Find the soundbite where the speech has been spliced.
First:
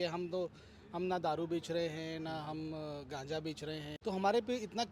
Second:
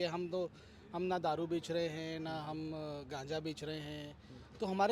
first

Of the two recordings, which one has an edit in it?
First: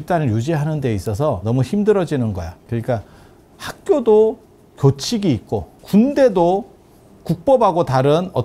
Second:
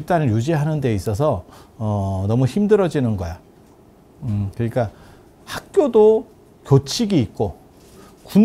first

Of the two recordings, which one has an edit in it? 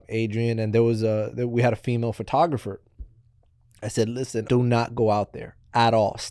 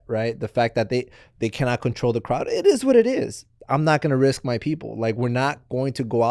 first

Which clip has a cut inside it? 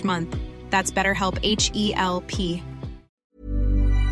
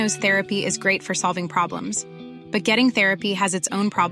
first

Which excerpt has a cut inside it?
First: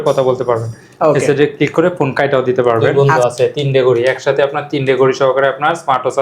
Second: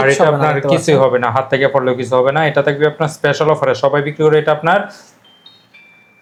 first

